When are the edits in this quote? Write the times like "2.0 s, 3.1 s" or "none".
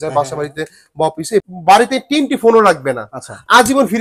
1.5 s